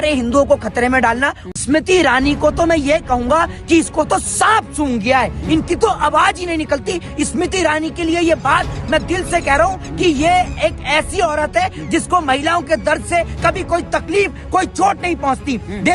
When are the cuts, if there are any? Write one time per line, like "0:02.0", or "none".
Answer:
0:01.4